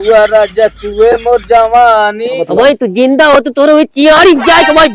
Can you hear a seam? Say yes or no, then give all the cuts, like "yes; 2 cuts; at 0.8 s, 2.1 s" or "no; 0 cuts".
yes; 1 cut; at 2.3 s